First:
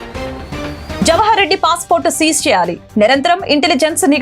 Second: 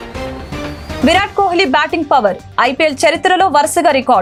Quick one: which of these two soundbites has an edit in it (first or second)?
first